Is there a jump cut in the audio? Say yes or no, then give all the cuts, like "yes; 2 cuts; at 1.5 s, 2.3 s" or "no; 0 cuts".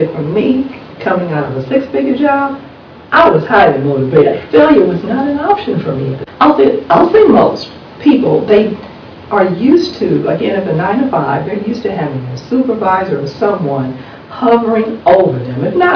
yes; 1 cut; at 6.2 s